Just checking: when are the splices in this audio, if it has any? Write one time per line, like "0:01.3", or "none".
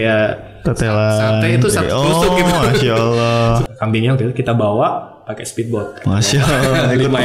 0:03.6